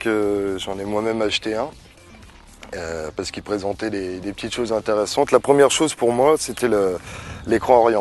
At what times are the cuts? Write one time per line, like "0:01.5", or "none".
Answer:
0:05.0